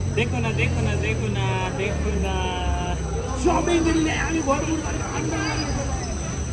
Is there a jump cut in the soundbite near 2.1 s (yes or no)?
no